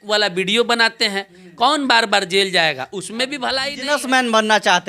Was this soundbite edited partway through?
yes; 1 cut; at 3.7 s

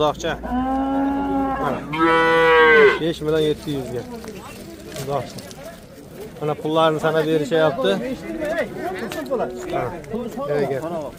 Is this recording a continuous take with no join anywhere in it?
yes; 0 cuts

